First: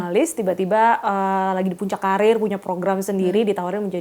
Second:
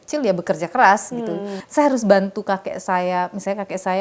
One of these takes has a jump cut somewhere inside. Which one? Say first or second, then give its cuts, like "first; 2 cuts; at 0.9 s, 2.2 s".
second; 1 cut; at 1.6 s